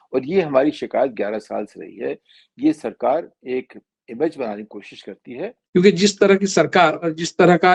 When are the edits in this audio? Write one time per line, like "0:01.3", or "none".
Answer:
0:05.5

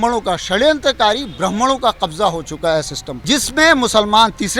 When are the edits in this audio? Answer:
0:03.0

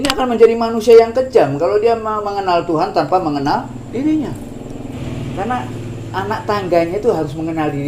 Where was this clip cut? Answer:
0:05.0

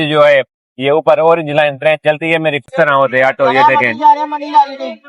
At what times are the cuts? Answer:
0:02.7

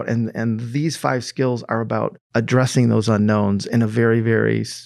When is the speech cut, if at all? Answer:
0:02.2

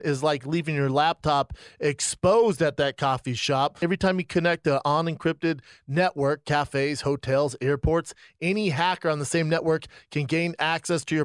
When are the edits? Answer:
0:03.8

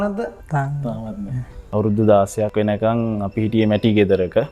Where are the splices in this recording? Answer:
0:01.7

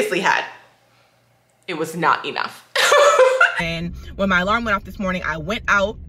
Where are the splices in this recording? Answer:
0:03.5

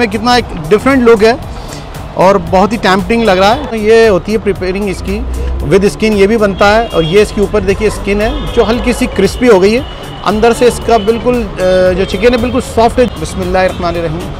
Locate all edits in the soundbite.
0:03.7
0:13.1

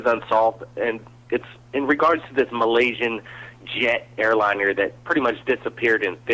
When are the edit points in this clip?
0:01.0

